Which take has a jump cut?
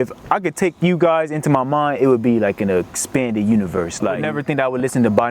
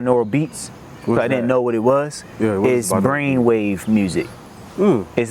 first; 1 cut; at 4.2 s

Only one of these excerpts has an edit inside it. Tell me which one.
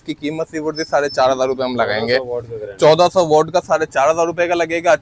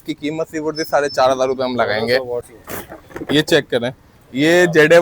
second; 1 cut; at 2.5 s

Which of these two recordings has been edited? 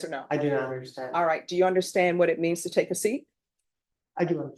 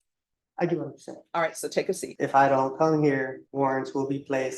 second; 2 cuts; at 2.1 s, 3.4 s

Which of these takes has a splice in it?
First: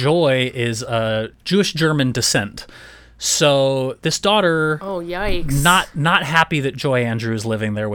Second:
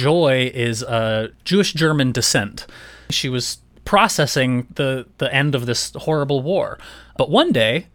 second; 2 cuts; at 3.2 s, 7.1 s

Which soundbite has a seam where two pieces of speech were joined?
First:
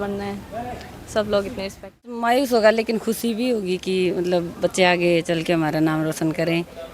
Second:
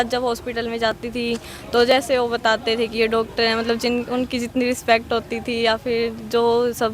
first; 1 cut; at 2.2 s

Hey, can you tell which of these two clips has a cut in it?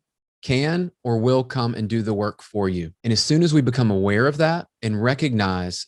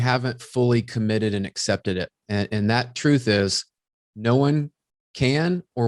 first; 1 cut; at 2.9 s

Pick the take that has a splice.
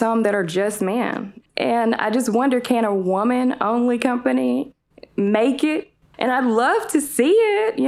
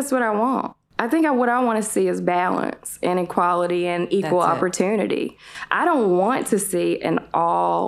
first; 2 cuts; at 1.4 s, 6.0 s

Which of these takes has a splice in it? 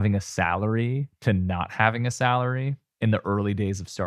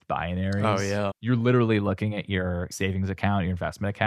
second; 2 cuts; at 1.2 s, 2.7 s

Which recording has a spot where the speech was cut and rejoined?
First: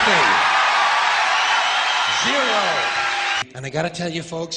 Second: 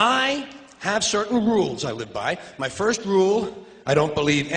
first; 1 cut; at 3.4 s

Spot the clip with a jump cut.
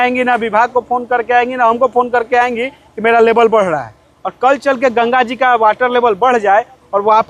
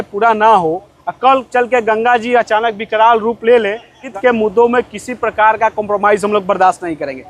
second; 1 cut; at 4.1 s

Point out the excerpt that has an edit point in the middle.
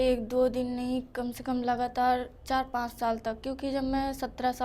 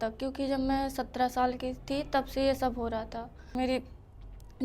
second; 1 cut; at 3.6 s

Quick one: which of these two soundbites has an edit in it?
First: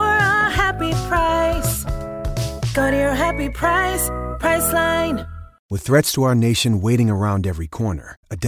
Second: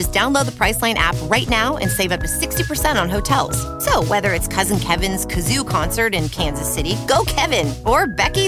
first; 1 cut; at 5.7 s

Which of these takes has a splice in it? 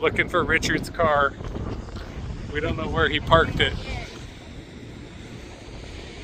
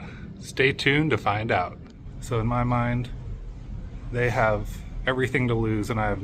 second; 1 cut; at 1.9 s

